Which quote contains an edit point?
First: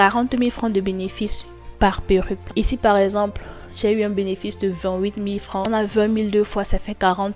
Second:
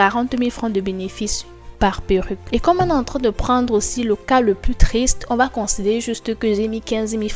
first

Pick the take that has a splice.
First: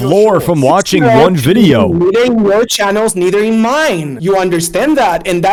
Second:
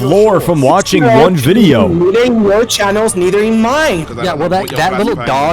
second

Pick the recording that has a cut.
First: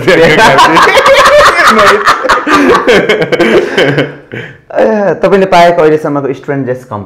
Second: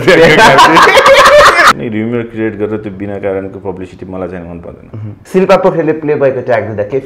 second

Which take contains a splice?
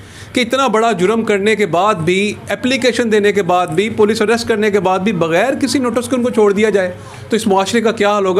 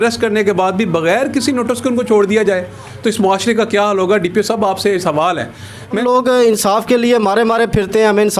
second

